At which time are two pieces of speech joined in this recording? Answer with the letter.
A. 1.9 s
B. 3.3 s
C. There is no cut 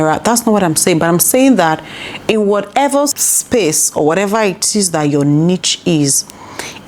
B